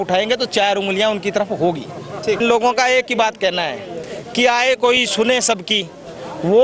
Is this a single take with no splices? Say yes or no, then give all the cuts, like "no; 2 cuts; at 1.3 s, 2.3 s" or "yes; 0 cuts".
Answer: no; 1 cut; at 2.4 s